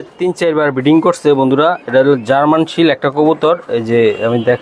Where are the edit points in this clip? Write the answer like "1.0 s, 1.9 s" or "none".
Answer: none